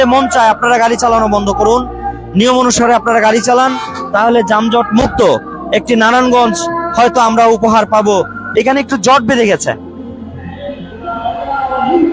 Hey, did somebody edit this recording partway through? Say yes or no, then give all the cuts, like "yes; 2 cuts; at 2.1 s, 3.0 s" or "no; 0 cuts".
yes; 1 cut; at 8.4 s